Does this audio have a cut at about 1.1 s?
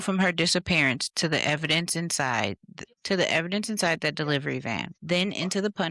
no; 0 cuts

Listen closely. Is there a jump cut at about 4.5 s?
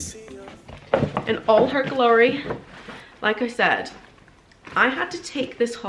no; 0 cuts

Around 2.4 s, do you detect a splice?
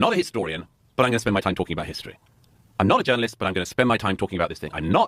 no; 0 cuts

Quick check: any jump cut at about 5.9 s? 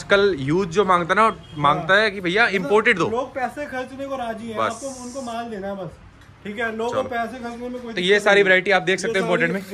no; 0 cuts

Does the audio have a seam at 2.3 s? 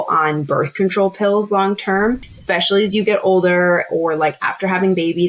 yes; 1 cut; at 2.3 s

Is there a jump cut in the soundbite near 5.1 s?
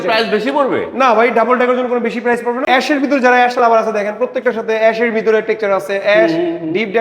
no; 1 cut; at 2.7 s

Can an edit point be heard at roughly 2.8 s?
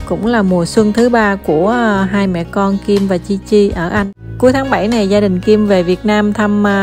no; 1 cut; at 4.1 s

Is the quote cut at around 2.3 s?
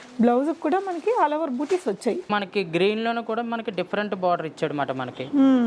yes; 1 cut; at 2.3 s

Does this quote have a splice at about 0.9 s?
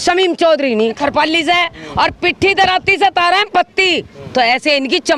yes; 1 cut; at 0.9 s

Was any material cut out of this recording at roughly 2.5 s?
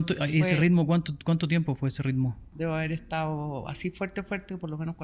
yes; 1 cut; at 2.5 s

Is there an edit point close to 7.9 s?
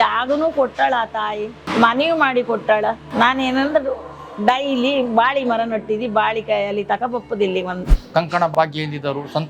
yes; 1 cut; at 7.9 s

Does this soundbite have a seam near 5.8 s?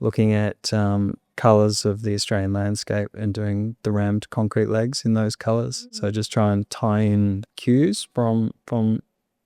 yes; 2 cuts; at 5.8 s, 7.5 s

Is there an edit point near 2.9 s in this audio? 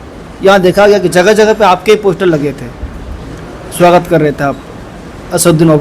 no; 0 cuts

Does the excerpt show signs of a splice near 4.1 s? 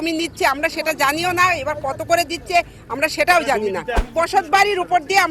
yes; 1 cut; at 4.1 s

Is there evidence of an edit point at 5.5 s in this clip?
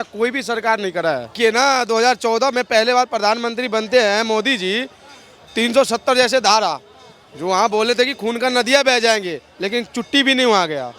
no; 1 cut; at 1.4 s

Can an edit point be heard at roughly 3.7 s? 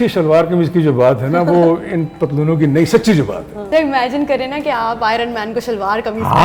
yes; 1 cut; at 3.7 s

